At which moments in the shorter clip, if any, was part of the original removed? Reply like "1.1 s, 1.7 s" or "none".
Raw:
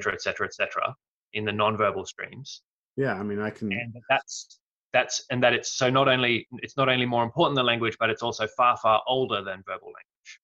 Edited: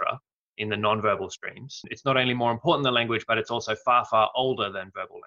1.8 s